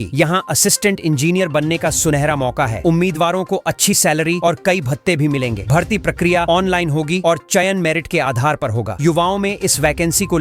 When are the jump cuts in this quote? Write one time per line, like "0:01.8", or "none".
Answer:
none